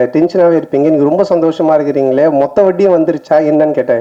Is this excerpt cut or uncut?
uncut